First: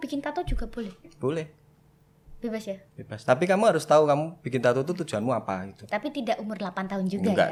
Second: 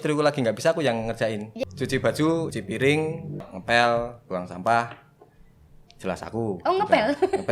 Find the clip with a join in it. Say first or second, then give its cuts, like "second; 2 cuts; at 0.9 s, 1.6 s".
second; 3 cuts; at 1.5 s, 2.5 s, 3.5 s